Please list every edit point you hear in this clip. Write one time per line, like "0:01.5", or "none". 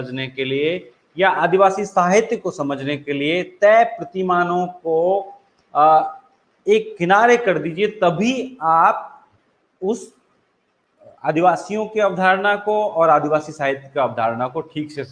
none